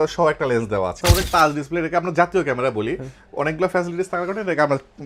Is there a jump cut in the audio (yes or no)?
yes